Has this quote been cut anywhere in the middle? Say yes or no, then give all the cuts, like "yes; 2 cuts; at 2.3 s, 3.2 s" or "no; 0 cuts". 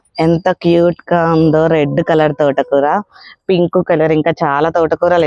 no; 0 cuts